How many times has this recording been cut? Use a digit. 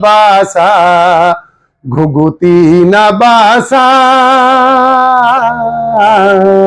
0